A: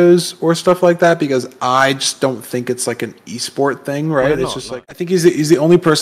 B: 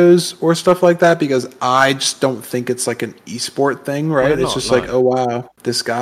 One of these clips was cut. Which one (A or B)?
A